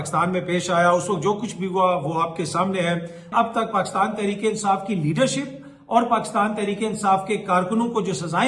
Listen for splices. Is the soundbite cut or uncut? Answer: cut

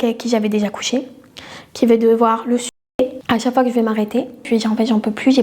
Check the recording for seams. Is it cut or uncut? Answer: cut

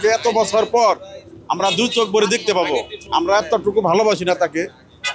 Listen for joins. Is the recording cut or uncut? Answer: cut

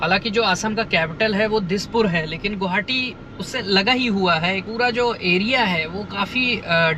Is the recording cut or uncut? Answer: uncut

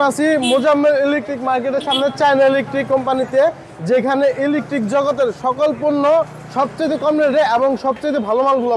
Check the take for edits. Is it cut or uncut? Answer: uncut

